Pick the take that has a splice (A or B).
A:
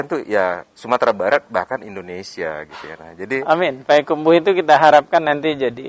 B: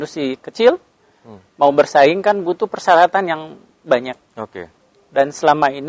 A